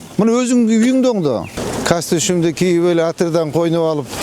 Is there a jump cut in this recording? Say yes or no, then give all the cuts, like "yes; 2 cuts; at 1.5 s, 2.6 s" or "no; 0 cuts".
yes; 1 cut; at 1.5 s